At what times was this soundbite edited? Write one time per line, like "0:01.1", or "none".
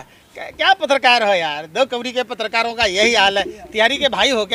none

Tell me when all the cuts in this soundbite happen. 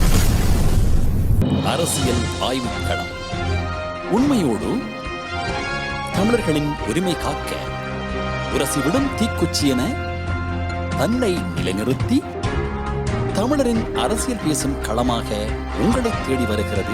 0:01.4

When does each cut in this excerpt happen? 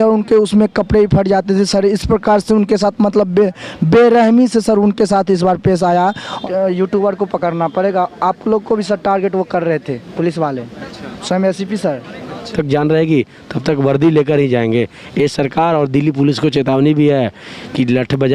0:06.4
0:12.5

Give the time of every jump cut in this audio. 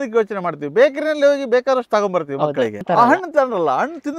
0:02.8

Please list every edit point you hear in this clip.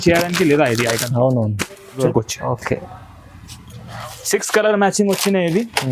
0:02.0

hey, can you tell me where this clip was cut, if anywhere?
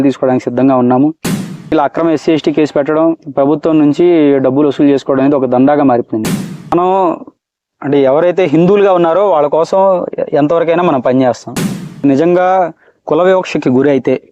0:01.7
0:06.7
0:12.0

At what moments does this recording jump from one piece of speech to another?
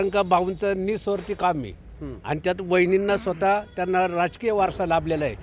none

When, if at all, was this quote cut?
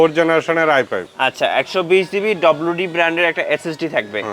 0:01.0

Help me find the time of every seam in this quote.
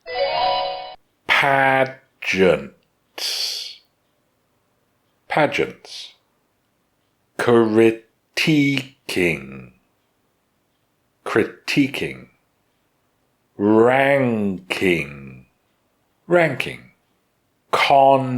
0:00.9

